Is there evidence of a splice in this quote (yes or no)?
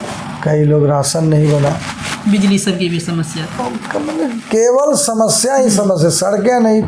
no